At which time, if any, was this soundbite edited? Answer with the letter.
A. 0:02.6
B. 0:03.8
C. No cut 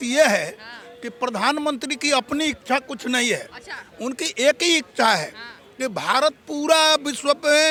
C